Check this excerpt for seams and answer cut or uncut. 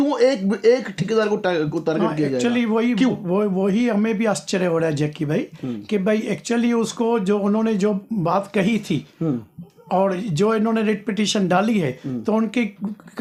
uncut